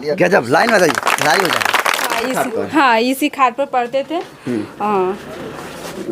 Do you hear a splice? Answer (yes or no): yes